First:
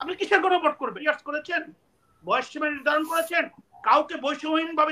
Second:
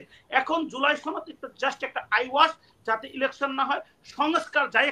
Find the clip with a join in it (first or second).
first